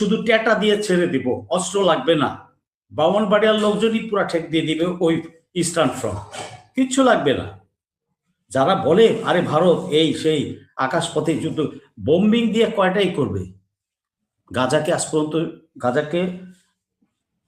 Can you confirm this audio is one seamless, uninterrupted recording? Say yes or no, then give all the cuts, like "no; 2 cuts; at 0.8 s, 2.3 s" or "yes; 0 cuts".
yes; 0 cuts